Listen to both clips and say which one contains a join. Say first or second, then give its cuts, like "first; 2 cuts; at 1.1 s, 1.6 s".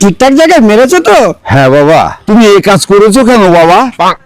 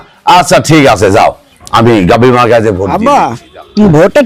first; 1 cut; at 2.2 s